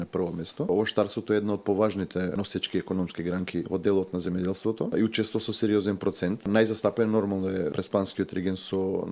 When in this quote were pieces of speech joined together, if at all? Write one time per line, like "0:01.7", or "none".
0:00.7
0:02.3
0:03.7
0:04.9
0:06.5
0:07.7